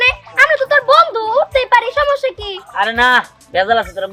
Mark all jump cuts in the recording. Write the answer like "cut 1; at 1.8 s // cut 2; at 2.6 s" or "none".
none